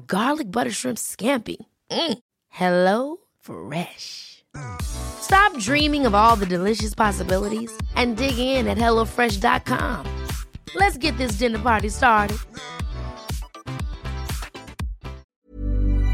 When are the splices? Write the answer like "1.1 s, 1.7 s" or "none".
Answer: 15.2 s